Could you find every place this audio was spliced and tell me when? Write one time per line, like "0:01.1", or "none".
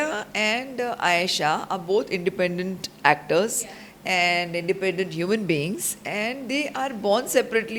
none